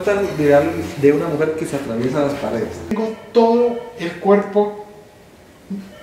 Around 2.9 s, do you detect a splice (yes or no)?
yes